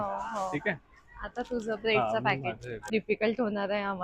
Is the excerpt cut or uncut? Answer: cut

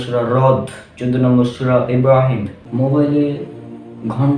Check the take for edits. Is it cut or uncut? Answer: cut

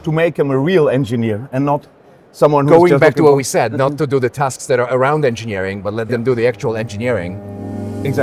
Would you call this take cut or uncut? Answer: uncut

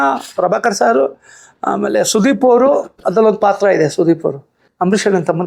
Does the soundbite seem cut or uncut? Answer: uncut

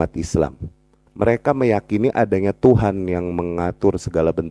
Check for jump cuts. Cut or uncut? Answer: cut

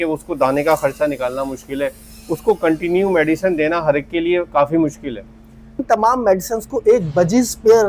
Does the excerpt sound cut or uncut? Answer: cut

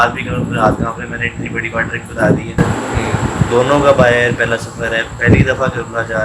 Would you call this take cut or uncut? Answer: cut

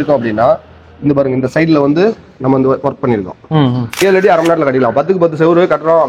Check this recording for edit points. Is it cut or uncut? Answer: cut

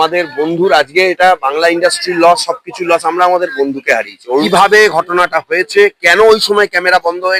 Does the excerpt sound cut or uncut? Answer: cut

